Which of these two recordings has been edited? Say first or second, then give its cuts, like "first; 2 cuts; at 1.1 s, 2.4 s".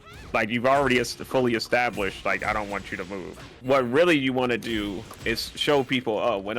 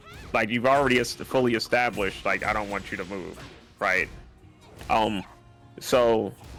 first; 1 cut; at 3.5 s